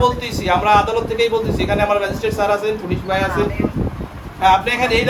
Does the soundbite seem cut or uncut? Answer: uncut